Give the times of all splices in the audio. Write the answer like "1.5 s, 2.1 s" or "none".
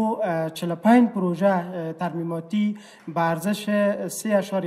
none